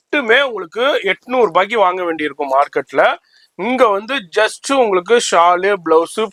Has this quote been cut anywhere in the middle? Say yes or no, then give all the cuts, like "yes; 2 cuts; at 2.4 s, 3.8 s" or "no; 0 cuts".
no; 0 cuts